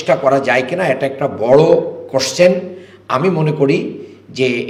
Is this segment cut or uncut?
uncut